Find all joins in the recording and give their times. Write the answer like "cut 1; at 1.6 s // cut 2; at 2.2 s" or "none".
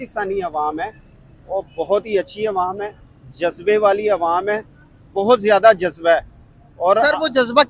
none